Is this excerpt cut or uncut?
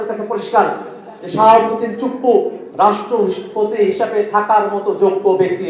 uncut